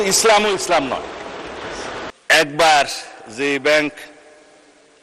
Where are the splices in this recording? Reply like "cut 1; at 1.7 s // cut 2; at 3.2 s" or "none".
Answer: cut 1; at 2.1 s